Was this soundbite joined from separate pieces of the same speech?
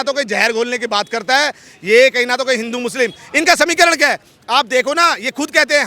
no; 0 cuts

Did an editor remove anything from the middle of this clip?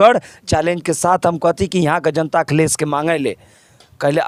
no; 0 cuts

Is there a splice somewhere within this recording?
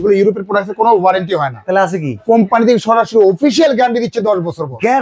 no; 0 cuts

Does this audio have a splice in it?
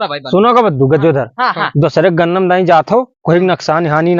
no; 0 cuts

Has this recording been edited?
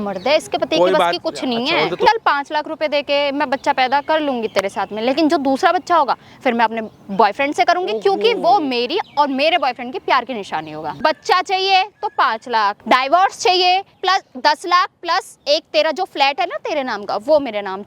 yes; 4 cuts; at 2.1 s, 10.9 s, 12.8 s, 14.0 s

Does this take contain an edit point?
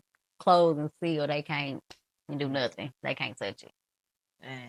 no; 0 cuts

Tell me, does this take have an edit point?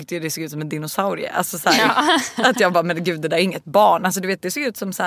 no; 0 cuts

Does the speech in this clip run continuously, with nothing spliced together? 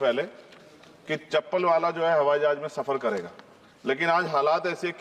yes; 0 cuts

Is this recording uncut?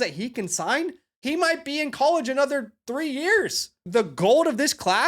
no; 2 cuts; at 1.1 s, 3.8 s

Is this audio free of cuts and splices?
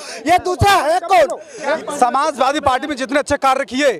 no; 1 cut; at 1.8 s

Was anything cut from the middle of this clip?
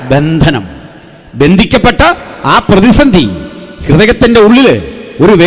no; 0 cuts

